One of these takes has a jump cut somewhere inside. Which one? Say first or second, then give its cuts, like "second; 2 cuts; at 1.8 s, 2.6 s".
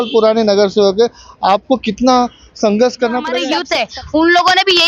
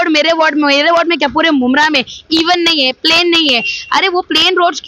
first; 1 cut; at 3.6 s